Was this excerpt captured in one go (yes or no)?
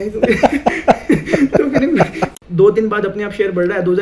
no